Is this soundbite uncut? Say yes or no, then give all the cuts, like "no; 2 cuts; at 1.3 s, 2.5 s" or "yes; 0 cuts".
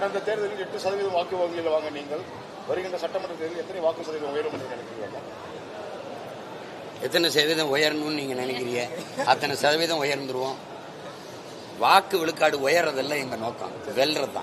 yes; 0 cuts